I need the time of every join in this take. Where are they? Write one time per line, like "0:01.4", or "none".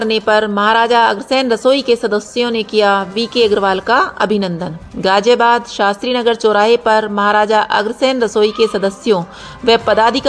none